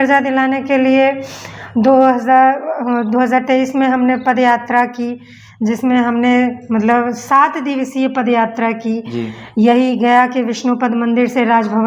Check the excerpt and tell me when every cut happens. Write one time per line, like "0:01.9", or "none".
none